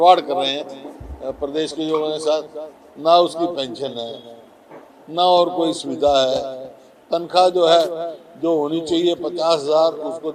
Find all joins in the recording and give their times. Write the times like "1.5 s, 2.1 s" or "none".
none